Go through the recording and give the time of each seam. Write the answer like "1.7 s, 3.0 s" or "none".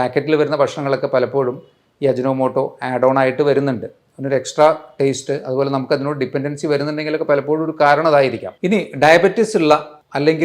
8.5 s